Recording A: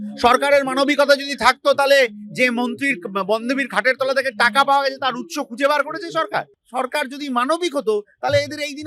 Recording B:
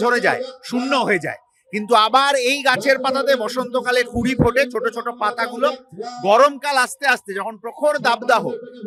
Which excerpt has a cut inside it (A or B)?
A